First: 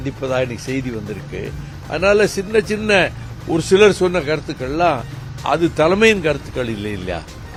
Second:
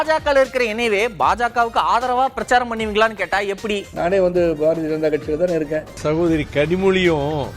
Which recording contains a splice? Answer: second; 2 cuts; at 3.9 s, 5.9 s

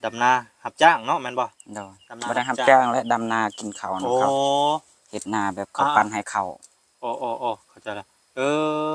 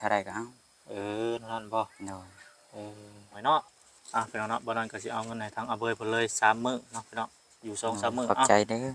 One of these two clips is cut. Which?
second; 1 cut; at 3.4 s

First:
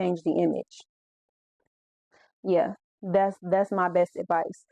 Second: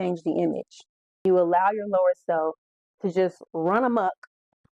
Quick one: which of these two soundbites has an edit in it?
second; 1 cut; at 1.2 s

